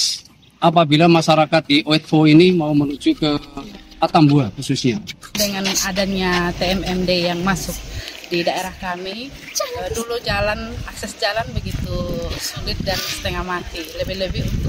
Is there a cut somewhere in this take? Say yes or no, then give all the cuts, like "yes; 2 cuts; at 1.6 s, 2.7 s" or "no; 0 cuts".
yes; 1 cut; at 5.4 s